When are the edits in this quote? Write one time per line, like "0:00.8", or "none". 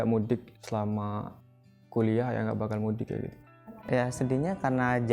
0:03.7